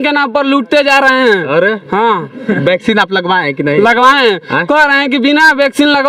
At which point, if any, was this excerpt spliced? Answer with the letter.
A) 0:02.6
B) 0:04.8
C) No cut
C